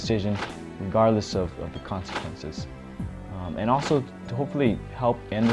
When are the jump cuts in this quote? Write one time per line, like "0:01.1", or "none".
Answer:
0:04.2